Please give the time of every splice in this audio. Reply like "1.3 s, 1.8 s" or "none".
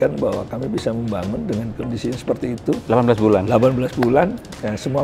none